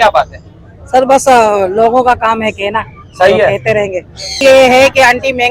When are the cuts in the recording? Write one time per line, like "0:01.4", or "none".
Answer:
0:04.2